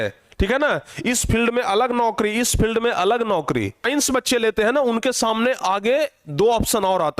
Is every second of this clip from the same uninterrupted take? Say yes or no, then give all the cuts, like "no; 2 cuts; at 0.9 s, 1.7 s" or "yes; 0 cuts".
no; 1 cut; at 3.8 s